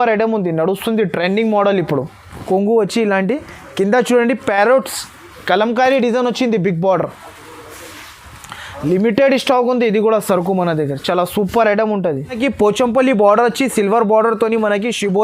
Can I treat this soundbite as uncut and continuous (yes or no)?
no